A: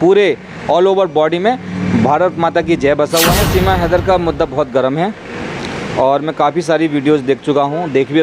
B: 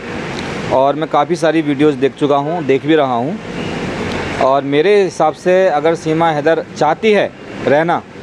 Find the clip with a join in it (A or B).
A